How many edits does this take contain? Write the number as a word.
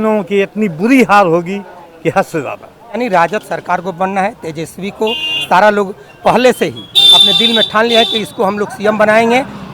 one